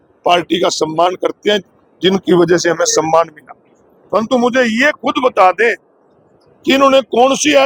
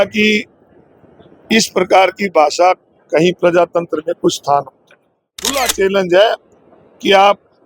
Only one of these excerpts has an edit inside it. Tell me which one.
second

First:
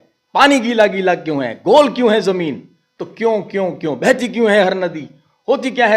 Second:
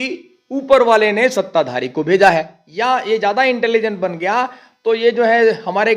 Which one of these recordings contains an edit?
second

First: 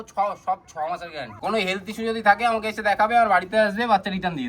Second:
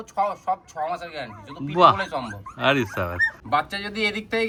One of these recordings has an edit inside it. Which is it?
first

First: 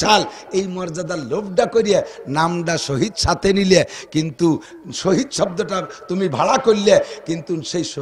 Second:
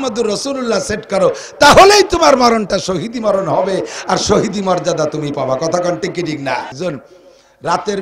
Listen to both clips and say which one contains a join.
second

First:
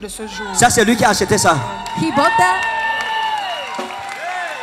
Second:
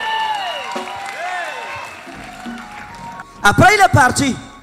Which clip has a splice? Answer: second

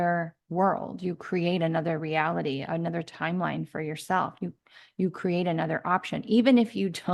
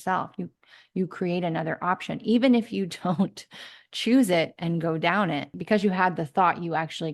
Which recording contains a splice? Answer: second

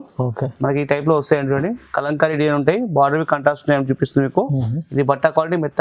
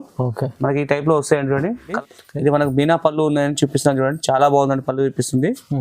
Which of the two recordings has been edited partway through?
second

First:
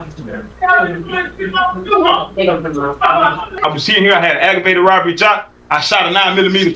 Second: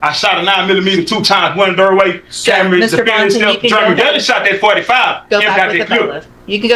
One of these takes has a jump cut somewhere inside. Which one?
first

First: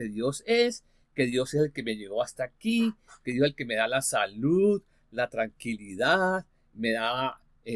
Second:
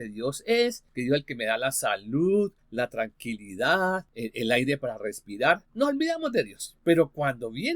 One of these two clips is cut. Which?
second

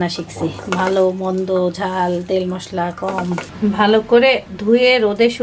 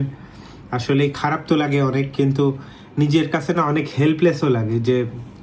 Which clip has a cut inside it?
first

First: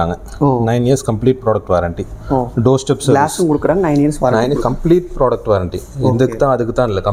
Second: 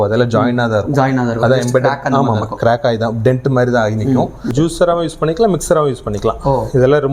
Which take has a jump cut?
second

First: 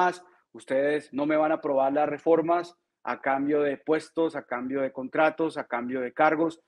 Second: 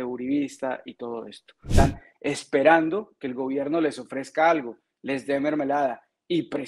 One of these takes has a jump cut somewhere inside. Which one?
second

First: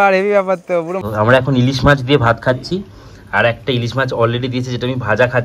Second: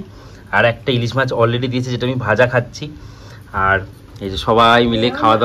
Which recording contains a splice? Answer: first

